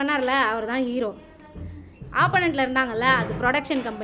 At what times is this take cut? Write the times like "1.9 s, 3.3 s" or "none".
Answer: none